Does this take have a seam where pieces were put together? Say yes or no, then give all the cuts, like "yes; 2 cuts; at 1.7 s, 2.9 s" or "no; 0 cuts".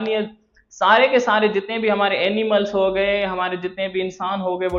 no; 0 cuts